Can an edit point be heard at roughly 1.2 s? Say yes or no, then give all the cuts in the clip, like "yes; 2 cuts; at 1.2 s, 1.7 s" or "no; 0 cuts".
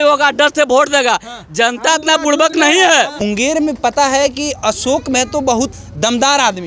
no; 2 cuts; at 3.2 s, 5.8 s